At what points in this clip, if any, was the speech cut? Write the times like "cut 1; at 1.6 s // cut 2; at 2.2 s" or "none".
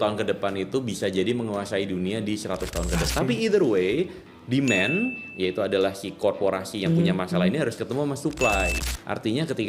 cut 1; at 3.1 s // cut 2; at 8.8 s